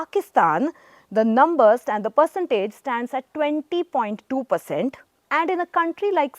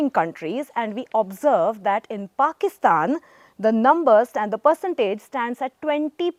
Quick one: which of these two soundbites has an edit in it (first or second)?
first